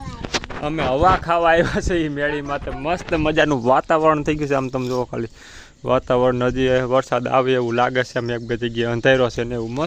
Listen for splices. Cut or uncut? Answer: uncut